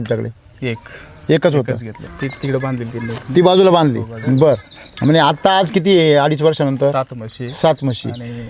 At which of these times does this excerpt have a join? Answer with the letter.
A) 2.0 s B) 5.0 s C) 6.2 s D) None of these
A